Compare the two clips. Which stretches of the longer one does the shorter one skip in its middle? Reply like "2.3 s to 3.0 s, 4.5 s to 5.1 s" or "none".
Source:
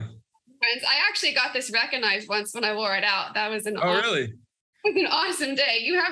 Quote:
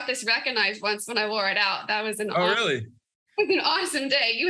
none

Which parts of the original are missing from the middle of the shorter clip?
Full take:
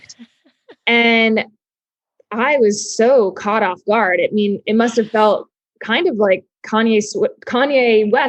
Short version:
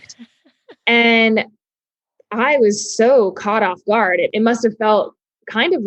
4.3 s to 4.6 s

